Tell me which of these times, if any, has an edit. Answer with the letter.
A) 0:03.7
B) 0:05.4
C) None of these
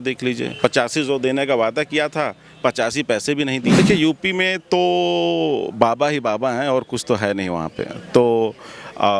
A